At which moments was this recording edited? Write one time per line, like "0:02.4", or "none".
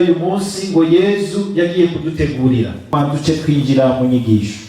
0:02.9